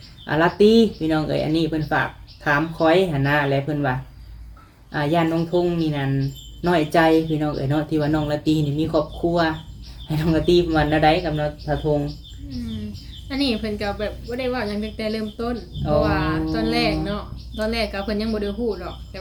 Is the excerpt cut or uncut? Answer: uncut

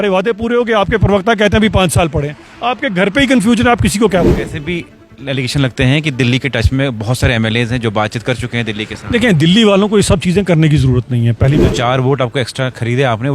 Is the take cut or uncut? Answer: cut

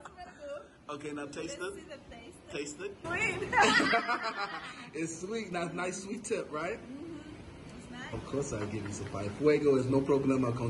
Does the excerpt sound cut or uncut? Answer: cut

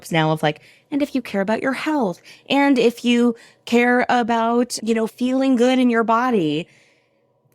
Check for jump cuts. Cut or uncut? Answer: cut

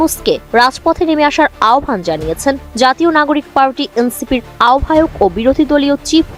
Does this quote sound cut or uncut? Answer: uncut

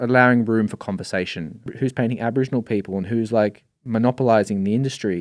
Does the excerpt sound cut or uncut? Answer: cut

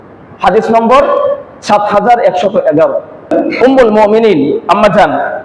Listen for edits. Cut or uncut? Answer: cut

